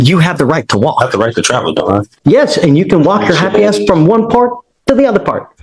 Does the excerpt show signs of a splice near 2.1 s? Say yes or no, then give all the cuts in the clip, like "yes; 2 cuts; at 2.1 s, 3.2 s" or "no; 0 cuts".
yes; 1 cut; at 2.1 s